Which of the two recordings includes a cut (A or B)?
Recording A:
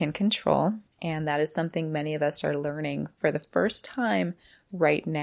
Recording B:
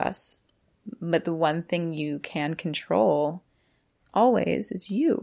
A